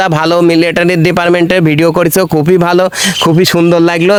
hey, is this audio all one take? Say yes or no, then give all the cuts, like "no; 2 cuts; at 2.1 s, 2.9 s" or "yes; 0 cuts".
yes; 0 cuts